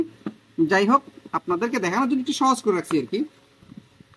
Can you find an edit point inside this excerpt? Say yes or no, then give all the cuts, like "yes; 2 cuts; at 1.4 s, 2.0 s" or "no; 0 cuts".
no; 0 cuts